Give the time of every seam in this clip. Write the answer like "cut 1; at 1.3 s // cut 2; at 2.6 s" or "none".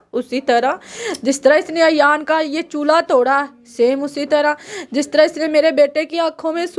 none